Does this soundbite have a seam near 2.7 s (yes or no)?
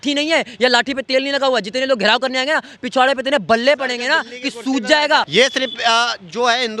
no